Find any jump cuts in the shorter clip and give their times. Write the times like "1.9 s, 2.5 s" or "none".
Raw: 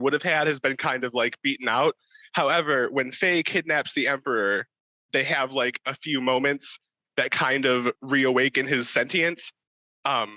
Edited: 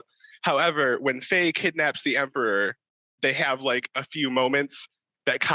none